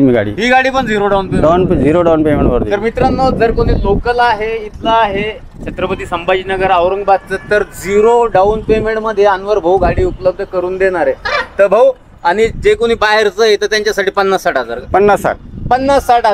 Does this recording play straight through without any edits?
yes; 0 cuts

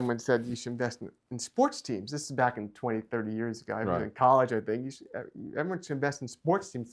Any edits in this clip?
no; 0 cuts

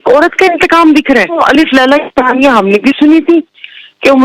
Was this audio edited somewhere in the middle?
yes; 1 cut; at 1.4 s

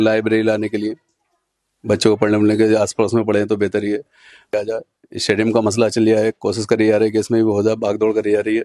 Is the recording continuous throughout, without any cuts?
no; 1 cut; at 4.5 s

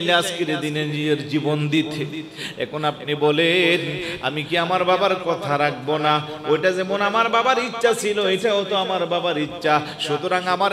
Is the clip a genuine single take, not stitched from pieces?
yes; 0 cuts

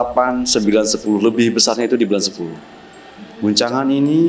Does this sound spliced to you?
no; 0 cuts

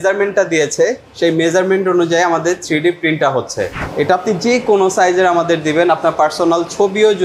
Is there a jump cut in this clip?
yes; 1 cut; at 3.8 s

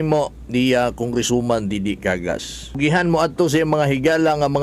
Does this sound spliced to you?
yes; 1 cut; at 2.8 s

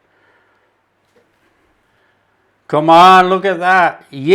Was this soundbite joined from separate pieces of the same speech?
yes; 1 cut; at 1.8 s

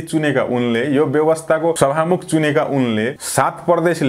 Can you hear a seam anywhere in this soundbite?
yes; 2 cuts; at 1.8 s, 3.2 s

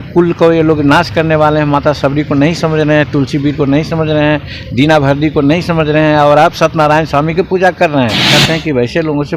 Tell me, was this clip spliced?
yes; 1 cut; at 8.4 s

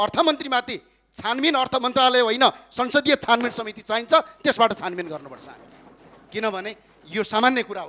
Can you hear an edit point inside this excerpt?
no; 0 cuts

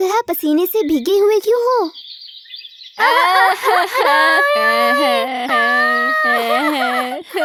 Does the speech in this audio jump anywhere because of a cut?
no; 0 cuts

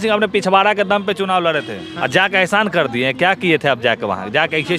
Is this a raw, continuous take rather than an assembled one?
no; 1 cut; at 1.8 s

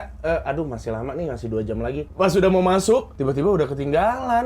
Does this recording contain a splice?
yes; 2 cuts; at 2.1 s, 3.1 s

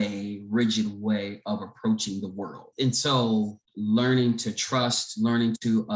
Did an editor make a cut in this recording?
yes; 2 cuts; at 2.7 s, 3.6 s

